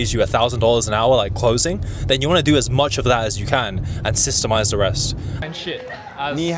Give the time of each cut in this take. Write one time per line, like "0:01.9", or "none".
0:05.4